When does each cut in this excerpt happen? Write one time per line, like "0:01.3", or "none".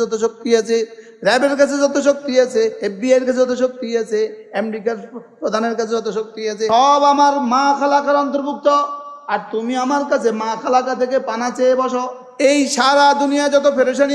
0:02.8
0:06.7
0:12.2